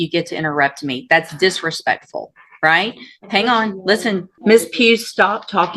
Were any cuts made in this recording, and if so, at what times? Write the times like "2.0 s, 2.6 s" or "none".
4.3 s